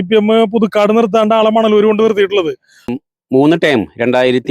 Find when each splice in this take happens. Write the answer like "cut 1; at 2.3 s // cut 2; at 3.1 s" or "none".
cut 1; at 3.0 s